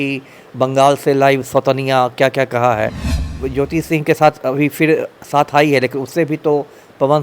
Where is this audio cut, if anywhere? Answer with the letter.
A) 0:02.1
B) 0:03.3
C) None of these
B